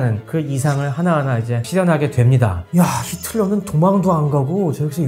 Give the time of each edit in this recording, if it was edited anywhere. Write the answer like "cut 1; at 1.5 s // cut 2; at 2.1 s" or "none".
cut 1; at 2.6 s